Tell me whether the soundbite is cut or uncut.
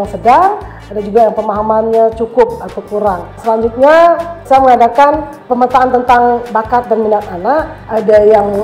cut